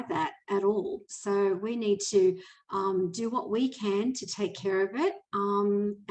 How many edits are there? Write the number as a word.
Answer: zero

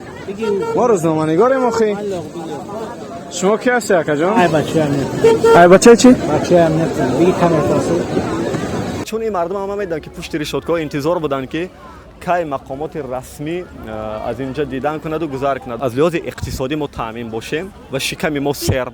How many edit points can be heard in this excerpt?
two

